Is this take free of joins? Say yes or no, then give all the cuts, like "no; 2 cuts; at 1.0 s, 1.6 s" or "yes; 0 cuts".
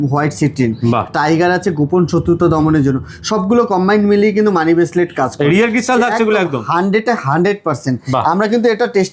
yes; 0 cuts